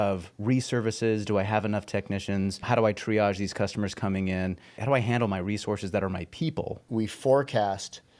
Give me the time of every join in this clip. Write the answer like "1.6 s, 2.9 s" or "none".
2.6 s, 4.8 s, 6.8 s